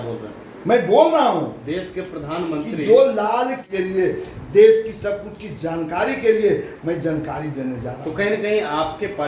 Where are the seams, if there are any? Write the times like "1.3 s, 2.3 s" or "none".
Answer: 3.6 s